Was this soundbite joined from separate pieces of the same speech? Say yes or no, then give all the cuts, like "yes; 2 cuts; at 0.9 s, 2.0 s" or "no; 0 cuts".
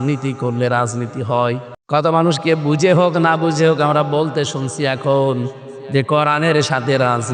yes; 1 cut; at 1.7 s